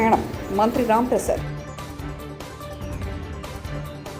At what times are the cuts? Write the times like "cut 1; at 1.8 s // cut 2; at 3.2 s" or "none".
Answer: none